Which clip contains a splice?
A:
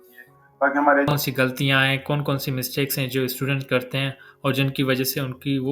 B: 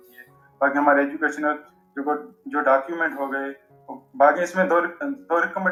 A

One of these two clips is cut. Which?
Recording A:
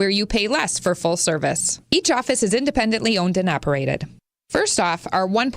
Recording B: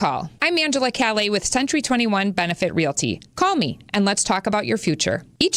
A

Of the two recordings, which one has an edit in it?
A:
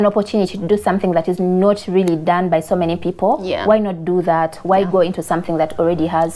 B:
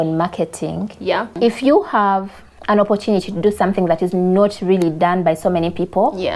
B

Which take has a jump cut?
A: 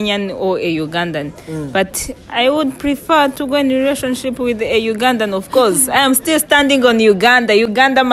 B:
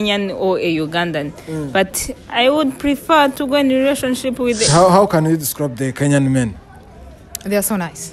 B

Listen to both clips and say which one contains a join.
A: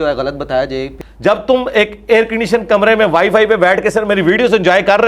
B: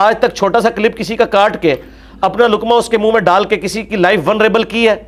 A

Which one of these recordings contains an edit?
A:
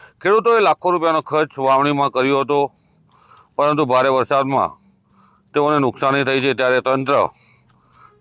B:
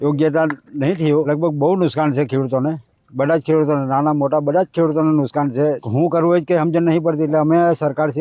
B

